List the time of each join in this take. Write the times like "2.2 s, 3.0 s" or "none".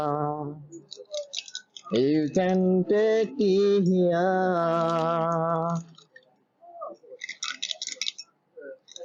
none